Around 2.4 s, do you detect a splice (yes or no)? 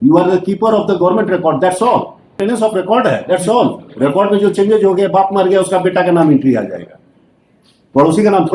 yes